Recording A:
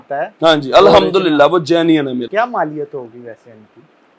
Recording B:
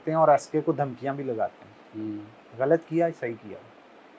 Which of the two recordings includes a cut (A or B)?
A